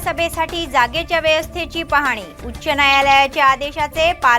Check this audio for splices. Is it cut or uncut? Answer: uncut